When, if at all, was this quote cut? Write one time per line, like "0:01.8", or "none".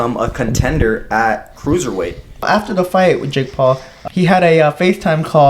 0:02.4
0:03.9